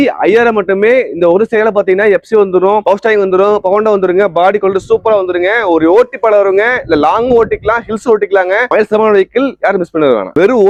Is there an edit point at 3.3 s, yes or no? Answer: no